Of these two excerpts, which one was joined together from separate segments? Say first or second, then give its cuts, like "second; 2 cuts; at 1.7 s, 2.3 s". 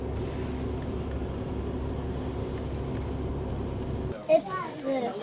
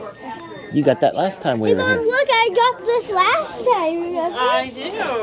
first; 1 cut; at 4.1 s